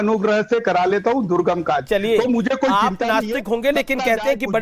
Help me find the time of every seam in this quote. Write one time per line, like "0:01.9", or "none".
none